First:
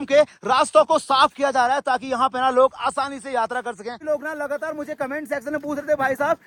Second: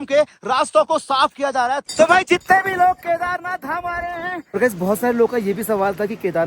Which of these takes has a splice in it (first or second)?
second